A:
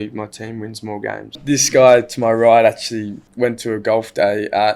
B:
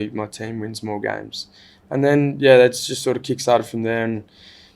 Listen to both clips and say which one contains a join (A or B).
A